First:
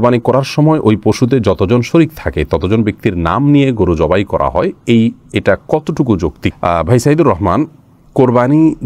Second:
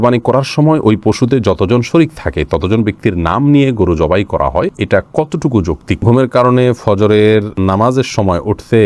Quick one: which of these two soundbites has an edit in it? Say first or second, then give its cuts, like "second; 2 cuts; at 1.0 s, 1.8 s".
second; 3 cuts; at 4.8 s, 6.0 s, 7.5 s